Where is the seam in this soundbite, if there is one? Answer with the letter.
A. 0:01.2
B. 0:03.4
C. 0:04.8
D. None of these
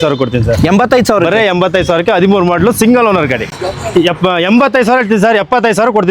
B